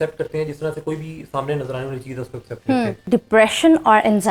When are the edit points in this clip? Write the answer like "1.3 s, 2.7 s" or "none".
3.1 s